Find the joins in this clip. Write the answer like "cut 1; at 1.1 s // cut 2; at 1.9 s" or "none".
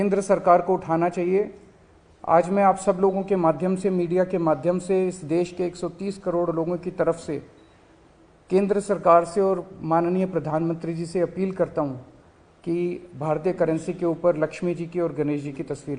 none